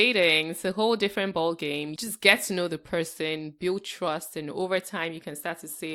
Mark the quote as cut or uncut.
cut